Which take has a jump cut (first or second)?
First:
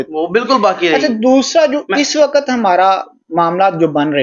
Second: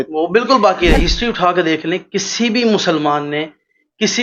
second